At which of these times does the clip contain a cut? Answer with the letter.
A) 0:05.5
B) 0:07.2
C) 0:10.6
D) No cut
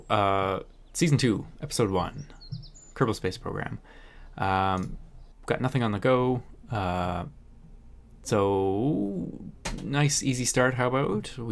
C